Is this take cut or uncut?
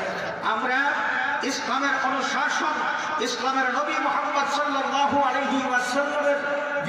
uncut